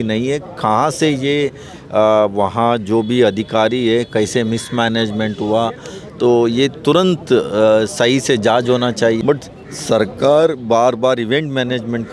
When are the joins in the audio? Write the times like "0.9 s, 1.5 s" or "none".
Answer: 9.2 s